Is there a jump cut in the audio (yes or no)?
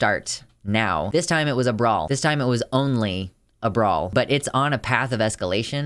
yes